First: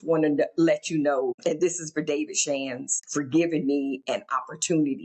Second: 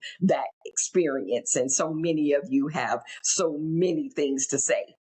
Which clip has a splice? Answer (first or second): first